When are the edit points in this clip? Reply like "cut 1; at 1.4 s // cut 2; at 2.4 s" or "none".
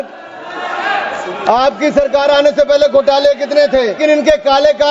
cut 1; at 4.0 s